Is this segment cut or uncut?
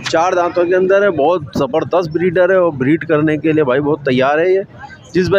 uncut